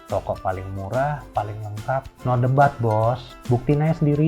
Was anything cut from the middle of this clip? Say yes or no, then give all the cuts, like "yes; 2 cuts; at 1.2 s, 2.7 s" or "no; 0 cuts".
yes; 2 cuts; at 2.1 s, 3.3 s